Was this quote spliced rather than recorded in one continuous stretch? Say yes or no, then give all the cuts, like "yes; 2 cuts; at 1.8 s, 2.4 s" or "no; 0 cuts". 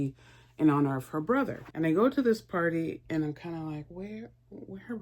yes; 1 cut; at 1.6 s